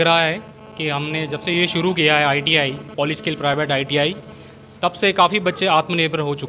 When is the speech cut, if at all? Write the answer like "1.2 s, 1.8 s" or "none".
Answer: none